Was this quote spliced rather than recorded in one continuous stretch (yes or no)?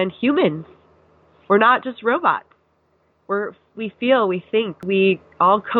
yes